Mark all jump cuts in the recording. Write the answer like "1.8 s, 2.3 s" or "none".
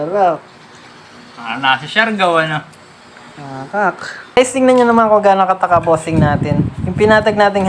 4.4 s